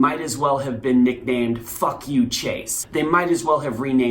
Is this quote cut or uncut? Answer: cut